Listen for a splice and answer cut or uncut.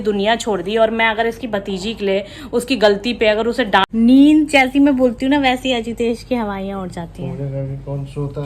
cut